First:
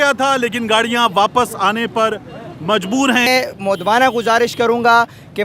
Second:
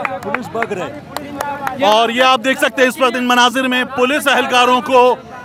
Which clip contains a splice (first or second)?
first